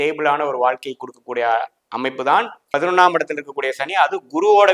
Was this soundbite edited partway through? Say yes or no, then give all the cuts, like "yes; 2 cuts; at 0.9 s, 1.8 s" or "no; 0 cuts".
no; 0 cuts